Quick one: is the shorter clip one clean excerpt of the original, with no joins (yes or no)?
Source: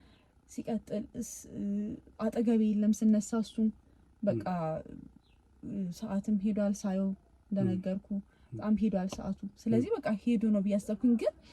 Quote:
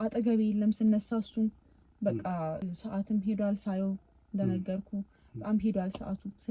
no